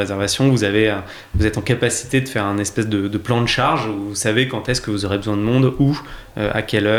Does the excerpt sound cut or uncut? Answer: uncut